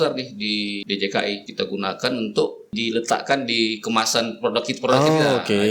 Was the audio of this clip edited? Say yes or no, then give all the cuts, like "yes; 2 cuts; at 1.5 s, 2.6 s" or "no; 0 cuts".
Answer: yes; 3 cuts; at 0.8 s, 1.5 s, 2.7 s